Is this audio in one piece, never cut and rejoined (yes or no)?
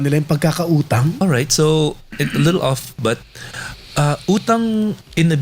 no